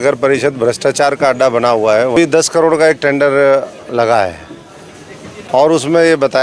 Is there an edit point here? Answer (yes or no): yes